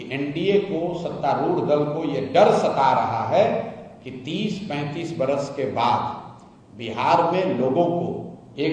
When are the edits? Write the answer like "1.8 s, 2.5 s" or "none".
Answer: none